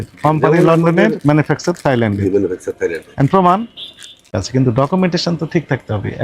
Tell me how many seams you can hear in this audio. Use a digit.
1